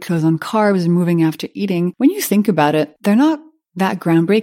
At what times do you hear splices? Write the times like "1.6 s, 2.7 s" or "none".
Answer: 1.9 s, 2.9 s